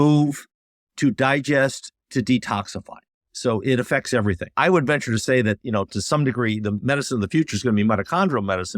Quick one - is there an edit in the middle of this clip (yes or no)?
yes